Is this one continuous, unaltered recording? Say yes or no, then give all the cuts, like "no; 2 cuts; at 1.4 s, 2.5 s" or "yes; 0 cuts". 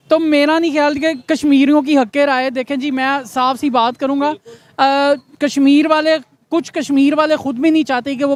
yes; 0 cuts